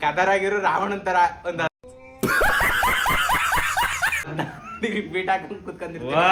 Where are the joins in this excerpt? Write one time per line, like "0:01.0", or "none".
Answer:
none